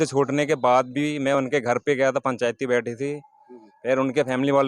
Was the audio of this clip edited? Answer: no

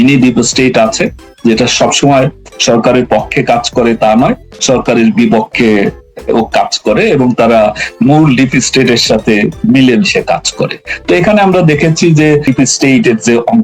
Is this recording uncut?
no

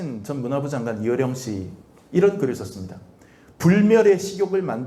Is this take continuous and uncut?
yes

